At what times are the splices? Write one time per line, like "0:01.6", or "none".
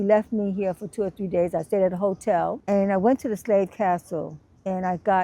0:02.6

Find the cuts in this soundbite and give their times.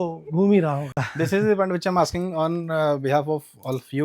none

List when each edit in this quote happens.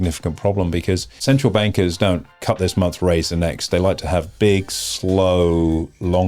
0:01.1
0:02.3

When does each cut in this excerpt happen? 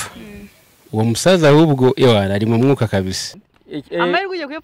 0:03.2

